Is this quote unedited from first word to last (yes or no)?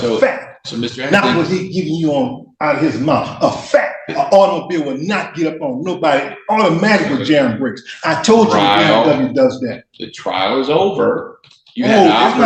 yes